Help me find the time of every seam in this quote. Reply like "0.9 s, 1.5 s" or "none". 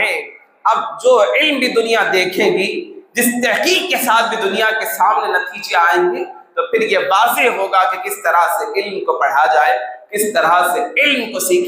none